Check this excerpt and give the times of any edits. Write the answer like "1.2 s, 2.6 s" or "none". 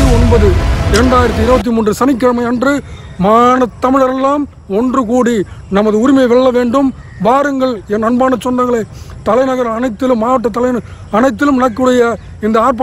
none